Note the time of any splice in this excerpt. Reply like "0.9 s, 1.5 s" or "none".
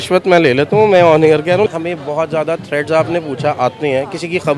1.7 s